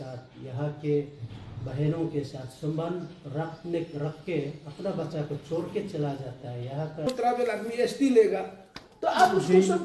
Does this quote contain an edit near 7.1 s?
yes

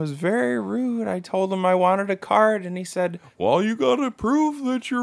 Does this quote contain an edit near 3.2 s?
yes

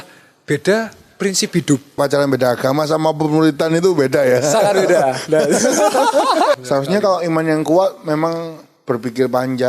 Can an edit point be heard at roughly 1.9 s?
yes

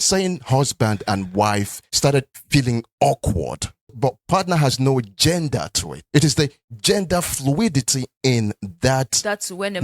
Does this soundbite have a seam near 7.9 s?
yes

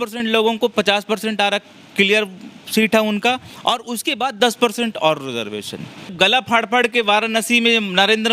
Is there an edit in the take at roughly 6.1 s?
yes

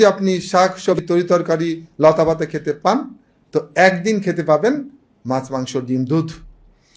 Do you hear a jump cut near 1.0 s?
yes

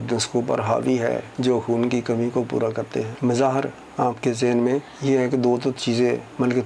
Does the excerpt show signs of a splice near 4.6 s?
no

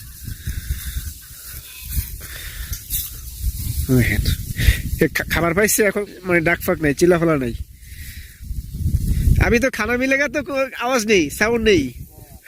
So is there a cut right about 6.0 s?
yes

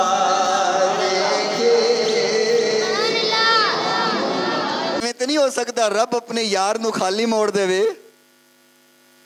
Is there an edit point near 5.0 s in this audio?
yes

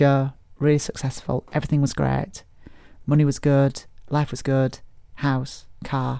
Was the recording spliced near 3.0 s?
no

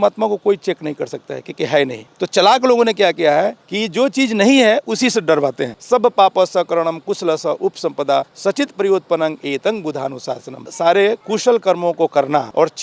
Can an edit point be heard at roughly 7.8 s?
no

